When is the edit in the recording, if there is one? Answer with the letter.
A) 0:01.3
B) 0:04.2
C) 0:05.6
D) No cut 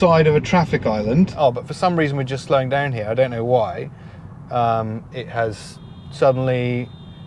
A